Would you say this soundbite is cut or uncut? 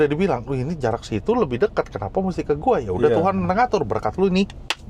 uncut